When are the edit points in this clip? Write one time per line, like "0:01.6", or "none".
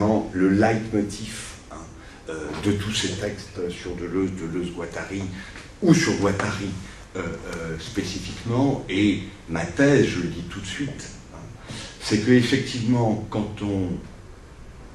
0:03.1

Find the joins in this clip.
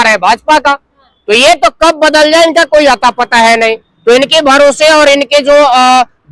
none

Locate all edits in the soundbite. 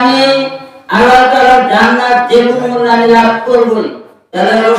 0:03.8

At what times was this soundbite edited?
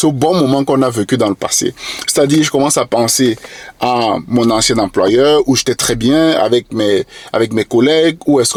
none

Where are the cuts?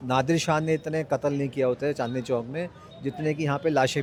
none

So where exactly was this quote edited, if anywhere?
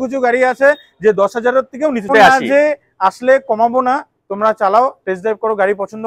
0:02.1

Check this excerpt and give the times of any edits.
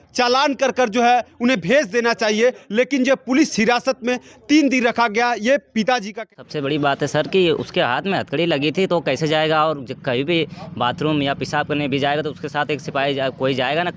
0:06.3

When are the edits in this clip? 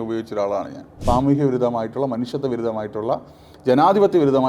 0:01.0

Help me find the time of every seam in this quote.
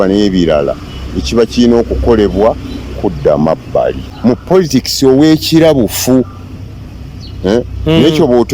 0:04.1

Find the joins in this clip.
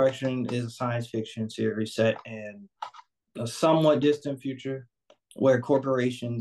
none

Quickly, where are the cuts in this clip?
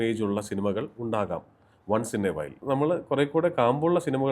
0:02.6

